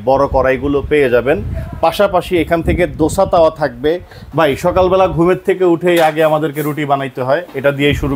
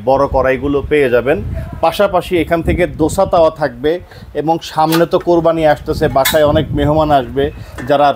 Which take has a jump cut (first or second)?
first